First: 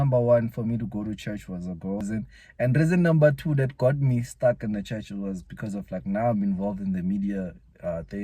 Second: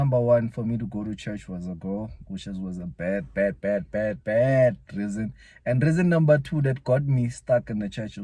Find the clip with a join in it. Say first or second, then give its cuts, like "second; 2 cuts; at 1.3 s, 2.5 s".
first; 1 cut; at 2.1 s